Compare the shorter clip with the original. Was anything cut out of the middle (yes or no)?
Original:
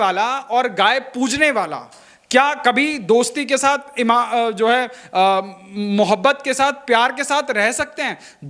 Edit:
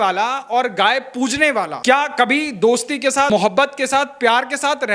yes